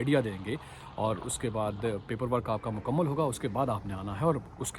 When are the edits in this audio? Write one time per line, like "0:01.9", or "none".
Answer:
none